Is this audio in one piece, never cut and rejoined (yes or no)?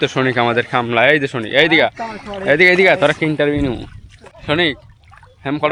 yes